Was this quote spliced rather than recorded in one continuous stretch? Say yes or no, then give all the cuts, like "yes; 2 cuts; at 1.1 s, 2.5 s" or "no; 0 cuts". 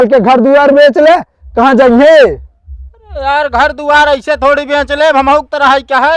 no; 0 cuts